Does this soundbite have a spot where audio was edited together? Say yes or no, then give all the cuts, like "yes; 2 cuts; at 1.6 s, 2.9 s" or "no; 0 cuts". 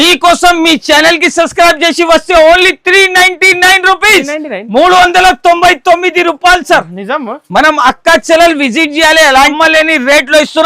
yes; 1 cut; at 9.5 s